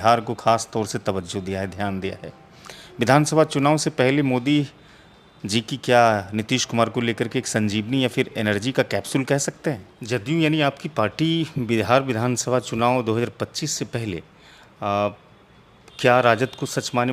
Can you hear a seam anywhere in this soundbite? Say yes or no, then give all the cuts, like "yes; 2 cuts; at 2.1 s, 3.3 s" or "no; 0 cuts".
yes; 1 cut; at 9.9 s